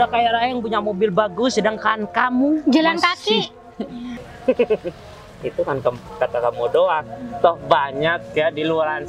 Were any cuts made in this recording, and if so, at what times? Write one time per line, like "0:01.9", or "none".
0:04.1

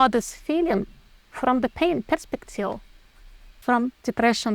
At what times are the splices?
0:03.6

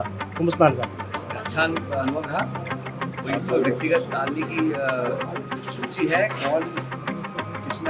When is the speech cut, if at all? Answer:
none

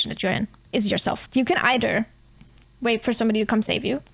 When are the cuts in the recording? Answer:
0:01.2

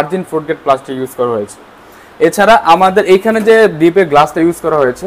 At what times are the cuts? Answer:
none

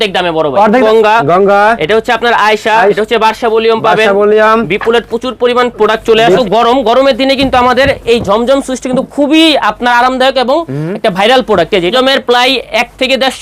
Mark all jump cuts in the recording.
0:00.8
0:03.0
0:06.4
0:11.9

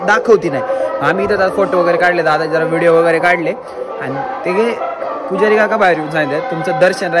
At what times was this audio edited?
none

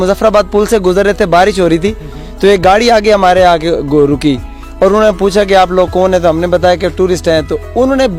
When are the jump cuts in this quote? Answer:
none

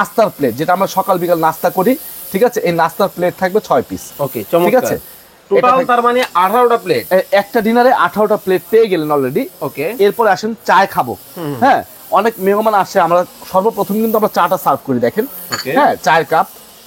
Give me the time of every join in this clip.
none

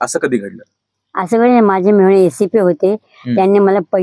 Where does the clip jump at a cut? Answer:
none

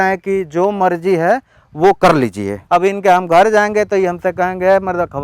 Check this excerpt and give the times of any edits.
0:02.5

